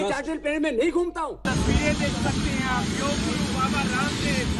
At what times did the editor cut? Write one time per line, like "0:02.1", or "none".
0:01.4